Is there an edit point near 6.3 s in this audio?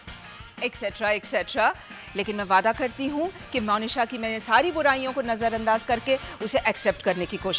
no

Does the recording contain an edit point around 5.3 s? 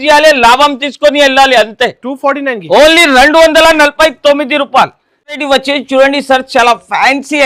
no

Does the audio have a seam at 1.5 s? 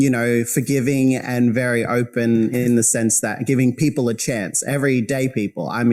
no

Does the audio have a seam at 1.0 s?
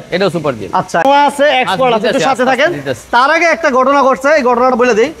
yes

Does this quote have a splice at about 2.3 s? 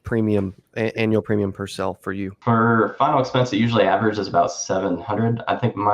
yes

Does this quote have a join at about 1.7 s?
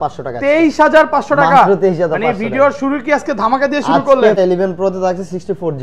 no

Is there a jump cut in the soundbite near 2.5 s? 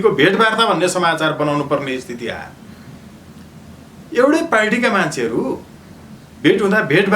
no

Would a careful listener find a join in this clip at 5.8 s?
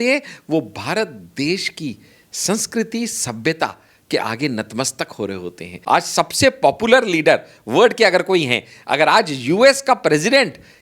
yes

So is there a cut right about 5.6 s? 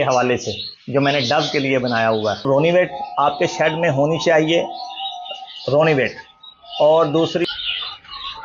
no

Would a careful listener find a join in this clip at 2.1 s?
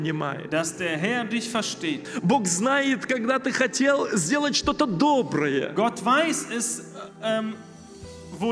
yes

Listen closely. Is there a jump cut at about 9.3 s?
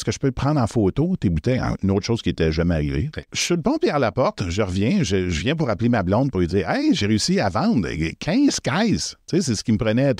no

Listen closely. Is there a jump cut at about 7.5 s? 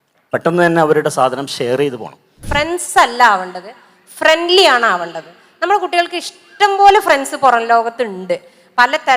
no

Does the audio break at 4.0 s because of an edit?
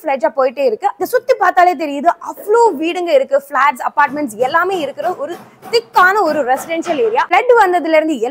no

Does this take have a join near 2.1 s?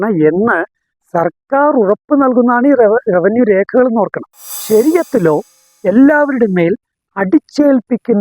no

